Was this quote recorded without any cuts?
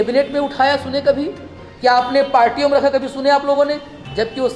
yes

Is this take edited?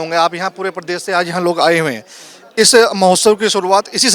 no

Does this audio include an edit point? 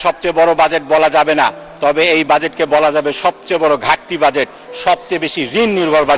no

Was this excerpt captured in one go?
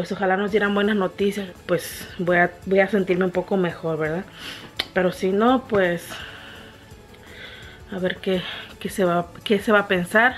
no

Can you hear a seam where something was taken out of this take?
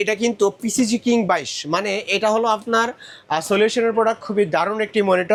no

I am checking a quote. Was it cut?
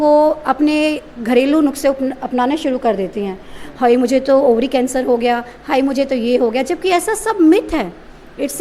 no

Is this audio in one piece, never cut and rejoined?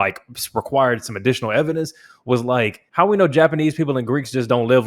no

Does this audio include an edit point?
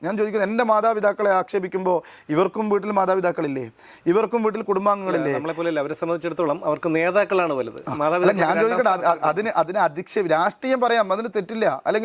no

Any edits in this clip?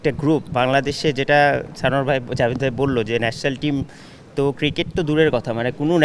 no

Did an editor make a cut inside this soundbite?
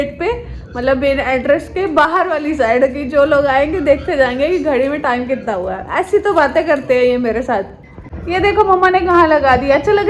no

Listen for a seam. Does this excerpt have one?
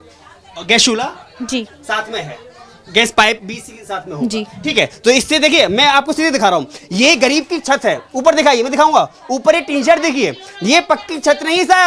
no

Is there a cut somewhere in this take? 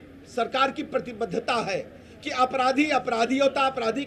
no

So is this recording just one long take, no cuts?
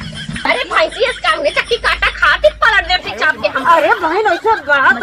yes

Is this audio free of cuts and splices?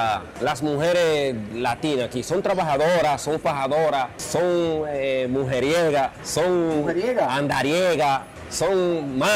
yes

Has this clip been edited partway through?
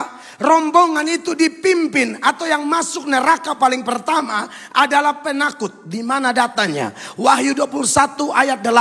no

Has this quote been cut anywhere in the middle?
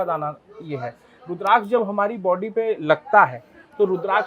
no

